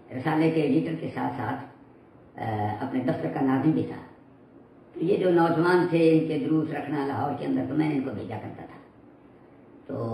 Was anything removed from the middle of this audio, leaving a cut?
no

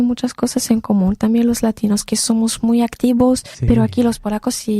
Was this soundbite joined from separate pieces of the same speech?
yes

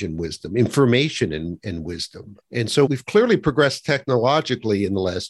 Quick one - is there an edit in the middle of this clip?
yes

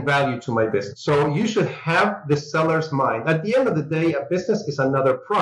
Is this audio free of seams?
yes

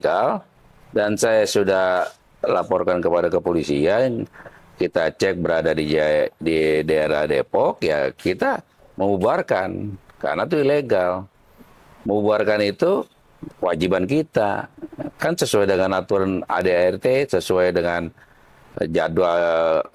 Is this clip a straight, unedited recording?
yes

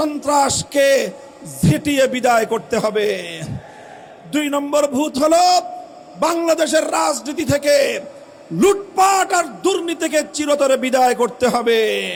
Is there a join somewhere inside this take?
no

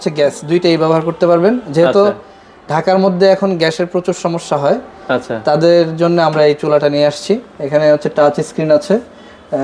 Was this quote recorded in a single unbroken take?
yes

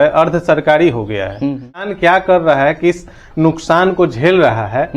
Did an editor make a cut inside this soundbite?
yes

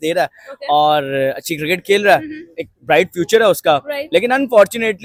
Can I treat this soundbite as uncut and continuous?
yes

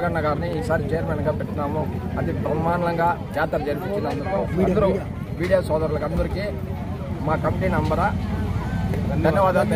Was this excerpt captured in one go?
yes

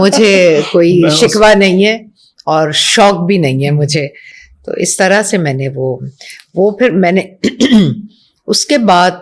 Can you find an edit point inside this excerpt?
no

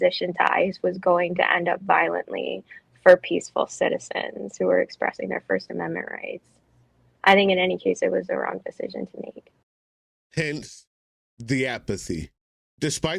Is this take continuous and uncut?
yes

